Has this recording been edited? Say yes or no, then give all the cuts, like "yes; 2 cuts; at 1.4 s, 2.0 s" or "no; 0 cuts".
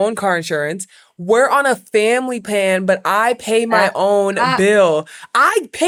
no; 0 cuts